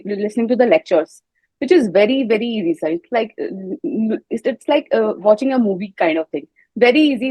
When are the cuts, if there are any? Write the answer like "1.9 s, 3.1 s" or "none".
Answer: none